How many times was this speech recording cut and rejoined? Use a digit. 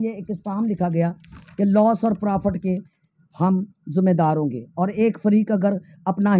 0